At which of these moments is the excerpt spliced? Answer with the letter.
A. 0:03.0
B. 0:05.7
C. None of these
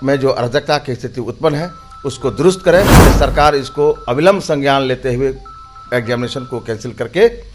A